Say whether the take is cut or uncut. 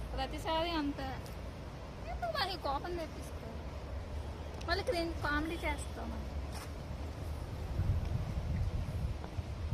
uncut